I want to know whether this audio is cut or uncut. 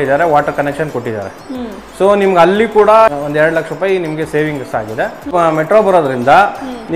cut